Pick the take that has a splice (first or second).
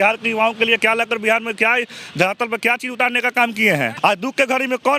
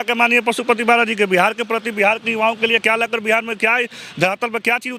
first